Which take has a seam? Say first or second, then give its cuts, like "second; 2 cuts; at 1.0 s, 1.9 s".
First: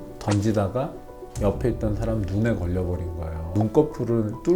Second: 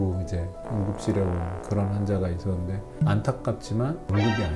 first; 1 cut; at 3.5 s